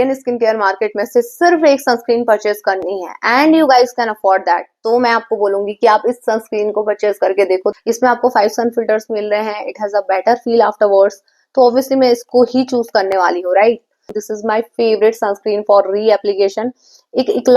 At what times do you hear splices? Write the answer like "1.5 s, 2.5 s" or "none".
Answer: 7.7 s, 14.2 s